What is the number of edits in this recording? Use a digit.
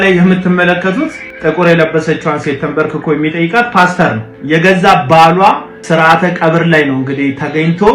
2